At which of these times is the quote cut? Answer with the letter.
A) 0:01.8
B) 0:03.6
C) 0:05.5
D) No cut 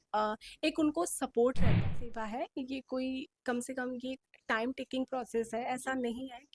A